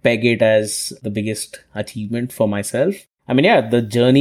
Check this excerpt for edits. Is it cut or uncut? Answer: cut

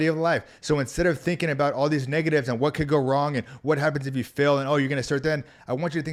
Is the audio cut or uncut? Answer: uncut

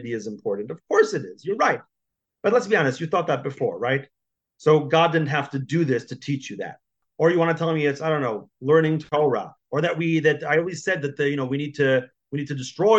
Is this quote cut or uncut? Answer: cut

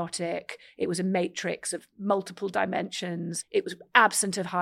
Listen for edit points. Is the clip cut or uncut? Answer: cut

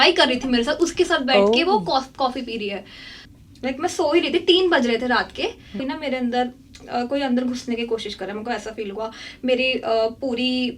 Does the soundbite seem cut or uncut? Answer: cut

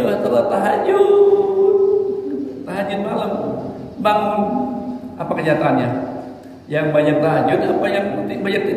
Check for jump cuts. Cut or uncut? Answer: uncut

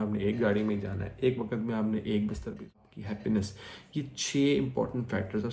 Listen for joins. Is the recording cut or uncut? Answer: cut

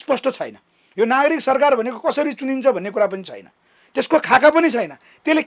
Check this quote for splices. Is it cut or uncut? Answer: uncut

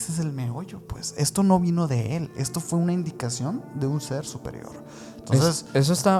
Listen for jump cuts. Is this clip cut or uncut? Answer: uncut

